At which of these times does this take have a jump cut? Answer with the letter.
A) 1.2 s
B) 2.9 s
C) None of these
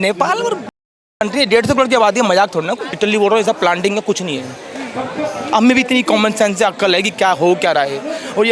B